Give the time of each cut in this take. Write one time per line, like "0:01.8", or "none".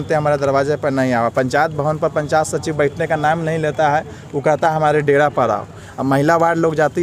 none